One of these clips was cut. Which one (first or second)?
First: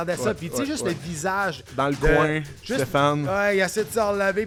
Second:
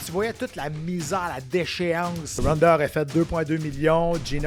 second